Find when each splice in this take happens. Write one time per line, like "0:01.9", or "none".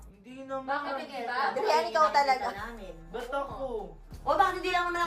0:04.1